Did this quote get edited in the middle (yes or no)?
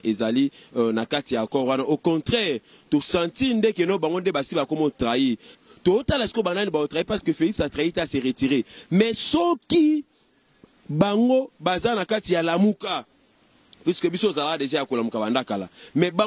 yes